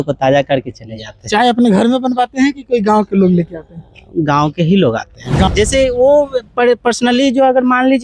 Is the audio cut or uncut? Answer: cut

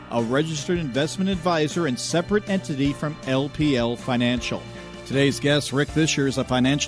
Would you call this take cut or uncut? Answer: cut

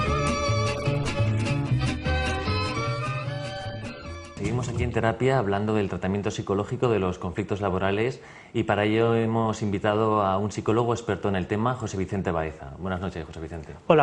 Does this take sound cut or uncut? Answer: cut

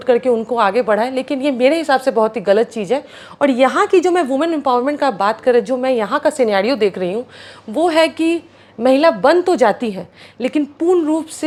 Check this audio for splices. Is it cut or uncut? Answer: uncut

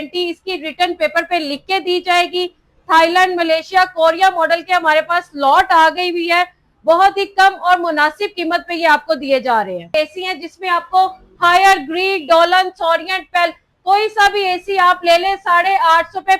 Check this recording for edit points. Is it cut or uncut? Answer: cut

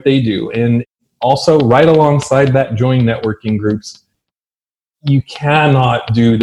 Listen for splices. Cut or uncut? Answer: cut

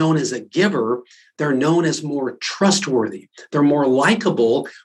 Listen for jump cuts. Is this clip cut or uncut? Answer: uncut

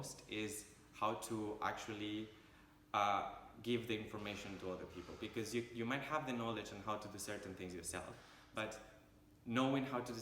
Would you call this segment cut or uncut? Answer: cut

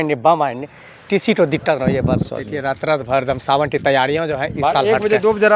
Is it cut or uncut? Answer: cut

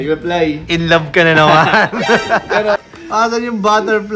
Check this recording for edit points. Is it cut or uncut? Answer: cut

